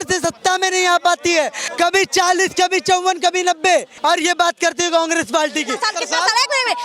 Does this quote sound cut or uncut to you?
cut